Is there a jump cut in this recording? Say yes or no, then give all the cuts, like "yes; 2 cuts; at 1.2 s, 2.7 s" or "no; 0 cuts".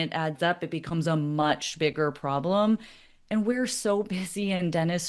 no; 0 cuts